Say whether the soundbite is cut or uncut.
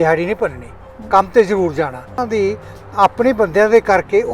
cut